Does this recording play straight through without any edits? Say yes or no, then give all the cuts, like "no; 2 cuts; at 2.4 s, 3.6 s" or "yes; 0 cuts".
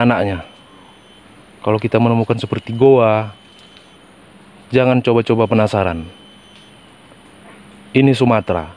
yes; 0 cuts